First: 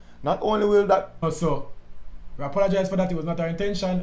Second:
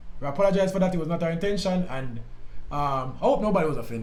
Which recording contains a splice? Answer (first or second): first